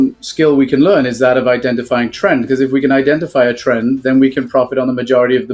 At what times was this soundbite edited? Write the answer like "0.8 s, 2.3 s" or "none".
none